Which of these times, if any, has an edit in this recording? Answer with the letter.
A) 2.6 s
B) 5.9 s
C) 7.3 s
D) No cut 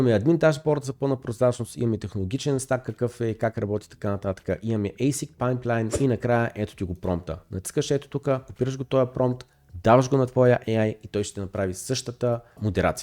B